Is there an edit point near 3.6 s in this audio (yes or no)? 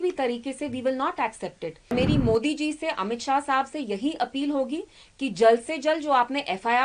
no